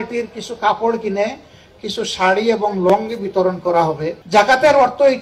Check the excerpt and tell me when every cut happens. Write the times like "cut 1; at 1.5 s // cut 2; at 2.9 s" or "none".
cut 1; at 4.2 s